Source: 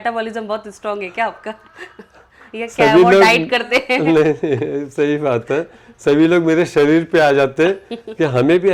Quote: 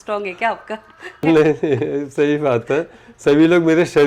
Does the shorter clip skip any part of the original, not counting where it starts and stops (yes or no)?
yes